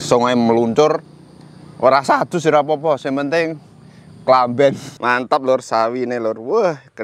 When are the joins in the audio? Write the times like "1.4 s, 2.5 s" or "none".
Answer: 4.9 s